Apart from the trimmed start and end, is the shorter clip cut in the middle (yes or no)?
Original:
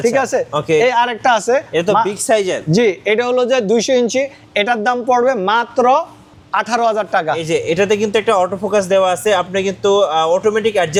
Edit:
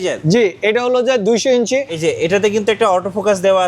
yes